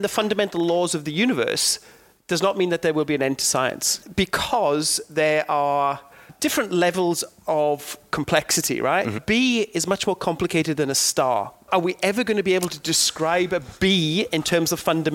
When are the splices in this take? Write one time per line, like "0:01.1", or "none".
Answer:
0:04.0
0:06.3
0:09.2
0:11.7